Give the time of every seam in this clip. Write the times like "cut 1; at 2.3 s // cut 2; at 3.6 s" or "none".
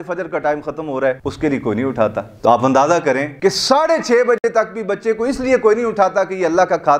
cut 1; at 1.3 s // cut 2; at 3.3 s